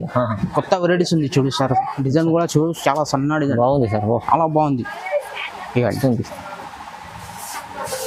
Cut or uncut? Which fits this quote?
uncut